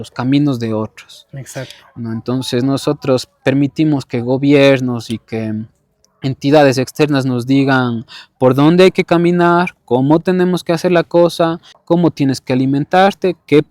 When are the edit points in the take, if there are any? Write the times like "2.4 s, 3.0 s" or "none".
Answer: 11.7 s

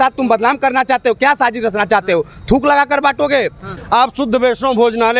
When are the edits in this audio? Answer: 3.7 s

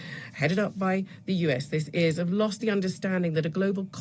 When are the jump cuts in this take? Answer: none

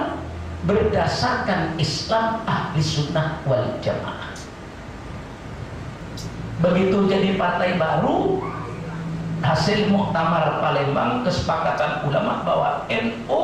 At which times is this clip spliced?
6.0 s

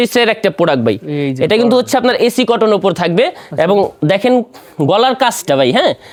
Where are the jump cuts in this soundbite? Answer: none

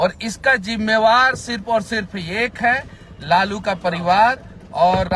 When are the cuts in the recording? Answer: none

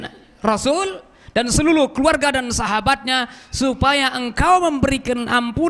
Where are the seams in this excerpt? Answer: none

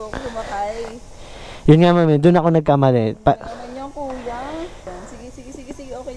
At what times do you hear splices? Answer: 4.8 s

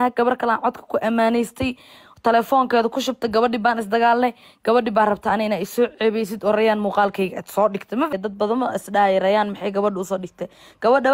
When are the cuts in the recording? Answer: 8.1 s

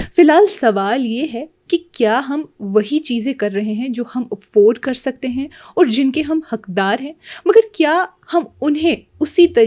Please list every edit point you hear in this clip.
none

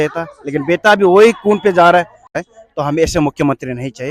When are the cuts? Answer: 2.3 s

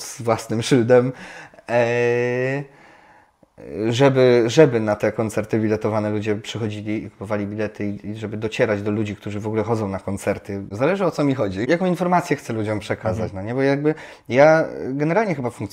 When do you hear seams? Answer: 10.7 s, 11.7 s

